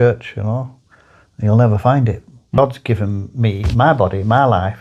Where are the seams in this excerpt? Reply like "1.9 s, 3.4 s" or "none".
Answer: 2.6 s